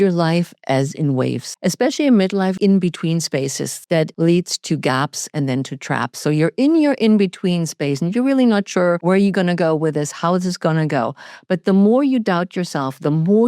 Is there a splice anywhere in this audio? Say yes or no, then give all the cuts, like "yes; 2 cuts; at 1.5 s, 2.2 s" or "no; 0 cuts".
yes; 4 cuts; at 1.5 s, 2.6 s, 4.0 s, 9.0 s